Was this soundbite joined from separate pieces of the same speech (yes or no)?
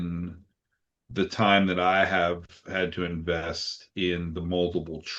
no